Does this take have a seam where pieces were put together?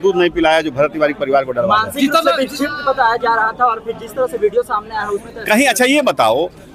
no; 0 cuts

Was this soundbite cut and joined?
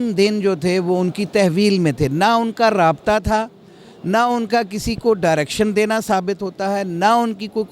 no; 0 cuts

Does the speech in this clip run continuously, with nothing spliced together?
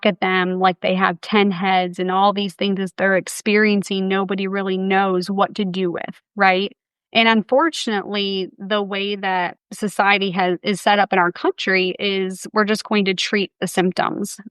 no; 1 cut; at 9.6 s

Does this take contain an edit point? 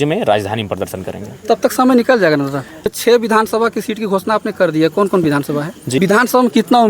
yes; 2 cuts; at 2.9 s, 6.0 s

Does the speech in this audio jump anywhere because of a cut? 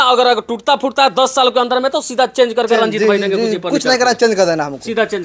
no; 0 cuts

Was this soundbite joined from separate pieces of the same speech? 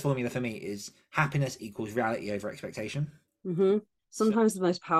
yes; 1 cut; at 4.0 s

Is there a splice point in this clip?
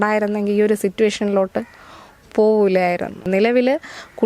yes; 1 cut; at 3.2 s

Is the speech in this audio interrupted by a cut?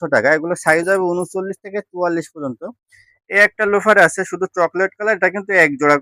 no; 0 cuts

